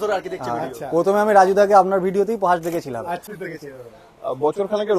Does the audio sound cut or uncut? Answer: cut